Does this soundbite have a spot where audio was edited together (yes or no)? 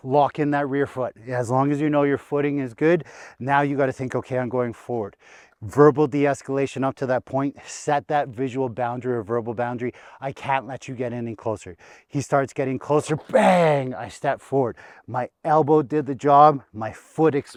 no